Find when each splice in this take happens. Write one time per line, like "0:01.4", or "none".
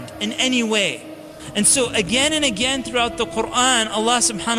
0:01.4